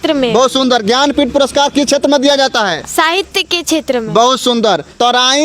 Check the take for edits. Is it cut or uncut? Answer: uncut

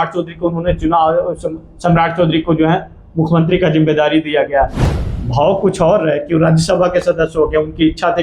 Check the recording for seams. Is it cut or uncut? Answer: cut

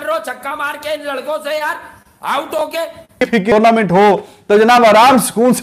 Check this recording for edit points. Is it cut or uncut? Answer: cut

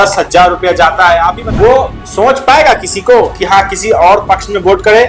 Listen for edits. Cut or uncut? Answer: cut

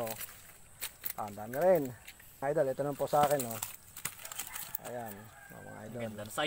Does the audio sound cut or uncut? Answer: cut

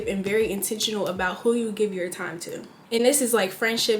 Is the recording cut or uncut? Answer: uncut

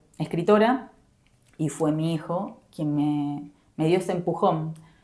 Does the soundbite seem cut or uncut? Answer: uncut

